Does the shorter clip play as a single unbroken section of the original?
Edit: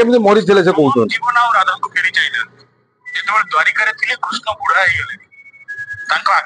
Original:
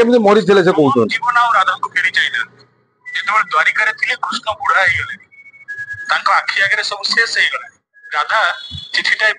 yes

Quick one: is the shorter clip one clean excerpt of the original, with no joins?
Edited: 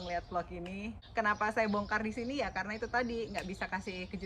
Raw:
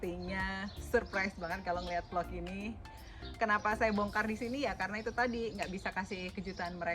no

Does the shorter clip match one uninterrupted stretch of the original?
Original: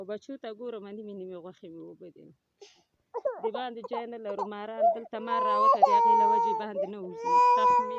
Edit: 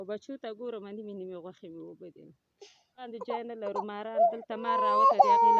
no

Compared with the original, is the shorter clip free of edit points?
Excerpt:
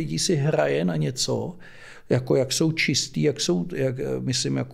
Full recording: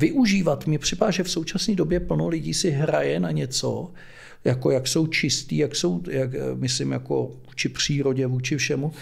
yes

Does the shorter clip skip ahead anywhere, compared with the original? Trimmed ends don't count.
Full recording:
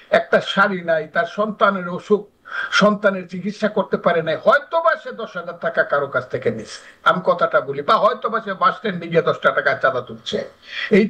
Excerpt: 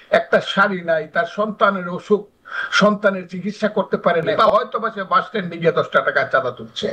yes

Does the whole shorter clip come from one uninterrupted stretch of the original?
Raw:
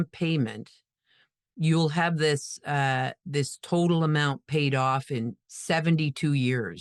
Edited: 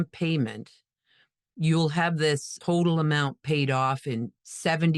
no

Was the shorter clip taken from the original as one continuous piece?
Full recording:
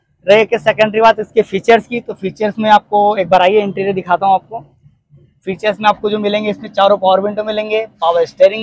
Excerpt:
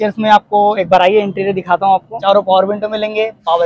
no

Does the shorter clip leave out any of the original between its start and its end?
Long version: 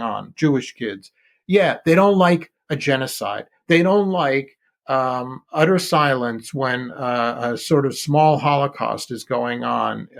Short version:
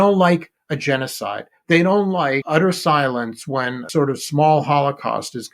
yes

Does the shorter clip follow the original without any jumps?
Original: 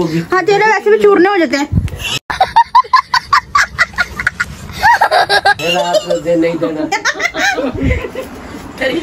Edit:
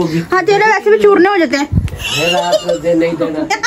no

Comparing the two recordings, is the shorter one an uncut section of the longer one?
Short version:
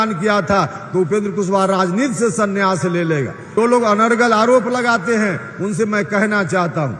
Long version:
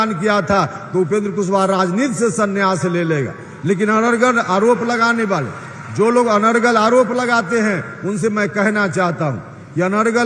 no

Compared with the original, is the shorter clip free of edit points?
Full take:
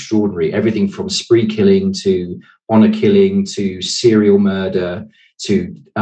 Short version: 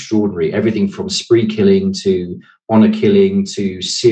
yes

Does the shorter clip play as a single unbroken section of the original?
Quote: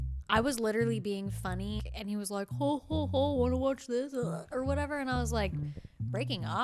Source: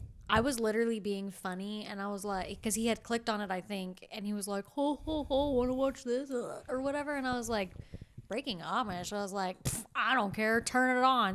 no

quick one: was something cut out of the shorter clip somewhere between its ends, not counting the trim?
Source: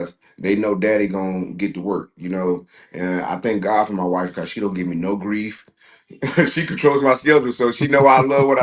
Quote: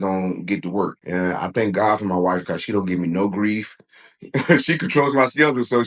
yes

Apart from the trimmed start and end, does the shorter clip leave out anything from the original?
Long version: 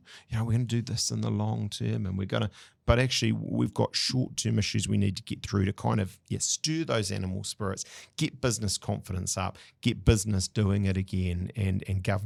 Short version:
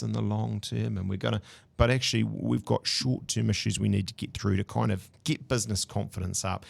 yes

